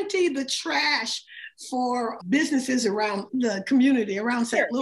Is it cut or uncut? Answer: uncut